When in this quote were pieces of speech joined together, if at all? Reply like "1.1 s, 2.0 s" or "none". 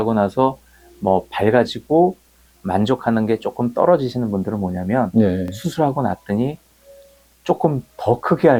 none